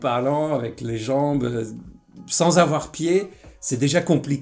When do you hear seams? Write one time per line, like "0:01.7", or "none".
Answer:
none